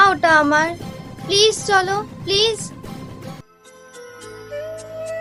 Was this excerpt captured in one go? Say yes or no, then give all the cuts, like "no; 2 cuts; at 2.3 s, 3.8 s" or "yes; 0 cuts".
yes; 0 cuts